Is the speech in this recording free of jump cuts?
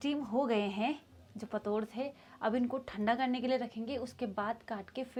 yes; 0 cuts

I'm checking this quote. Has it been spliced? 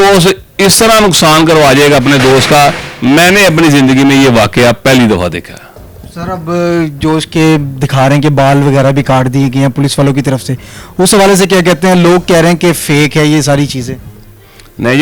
no; 0 cuts

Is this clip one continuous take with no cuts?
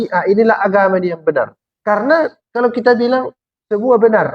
no; 1 cut; at 1.7 s

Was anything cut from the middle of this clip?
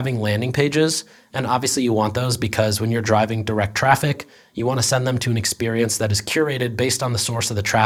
no; 0 cuts

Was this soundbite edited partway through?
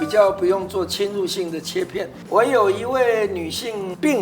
yes; 1 cut; at 2.2 s

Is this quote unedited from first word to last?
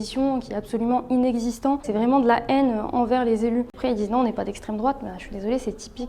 no; 2 cuts; at 1.9 s, 3.7 s

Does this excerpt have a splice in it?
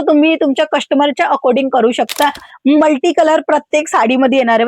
yes; 1 cut; at 2.5 s

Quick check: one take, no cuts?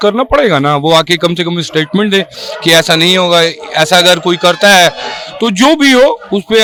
yes; 0 cuts

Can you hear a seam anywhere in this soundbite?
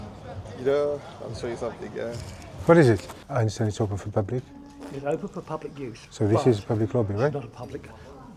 yes; 1 cut; at 3.2 s

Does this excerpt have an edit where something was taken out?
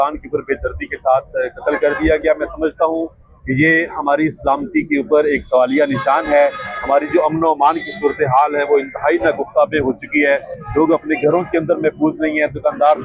no; 0 cuts

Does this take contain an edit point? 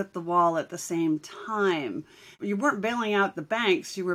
yes; 1 cut; at 2.3 s

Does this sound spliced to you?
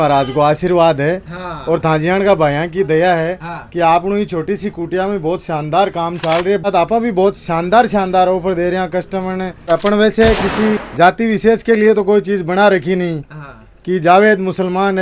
yes; 3 cuts; at 6.7 s, 9.7 s, 10.9 s

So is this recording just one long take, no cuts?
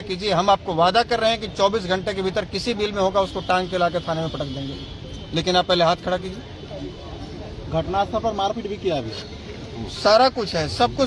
yes; 0 cuts

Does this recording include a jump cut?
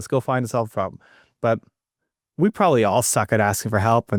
no; 0 cuts

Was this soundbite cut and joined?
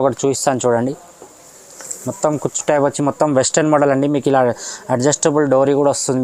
no; 0 cuts

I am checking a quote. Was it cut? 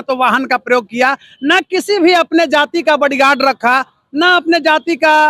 no; 0 cuts

